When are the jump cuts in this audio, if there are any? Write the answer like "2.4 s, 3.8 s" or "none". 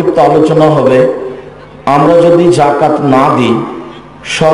none

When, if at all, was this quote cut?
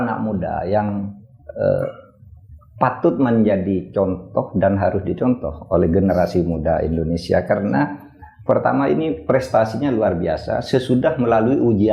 none

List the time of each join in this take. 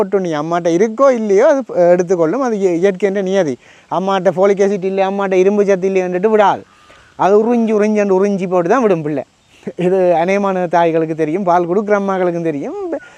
none

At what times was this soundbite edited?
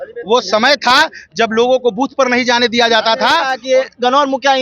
3.5 s

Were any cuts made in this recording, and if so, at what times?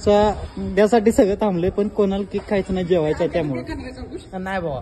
none

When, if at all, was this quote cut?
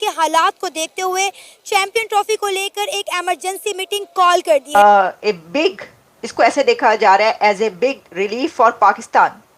4.7 s

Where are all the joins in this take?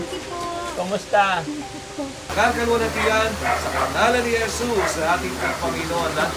2.2 s

